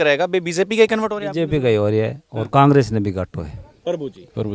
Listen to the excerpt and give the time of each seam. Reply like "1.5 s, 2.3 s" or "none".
3.6 s